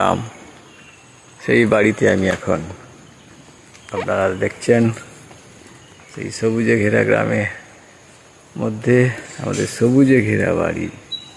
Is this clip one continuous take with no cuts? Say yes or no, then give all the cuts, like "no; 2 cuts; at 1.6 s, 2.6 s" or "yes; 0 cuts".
yes; 0 cuts